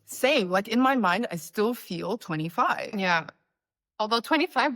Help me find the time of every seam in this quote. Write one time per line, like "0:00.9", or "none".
none